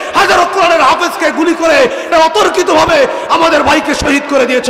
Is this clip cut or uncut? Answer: cut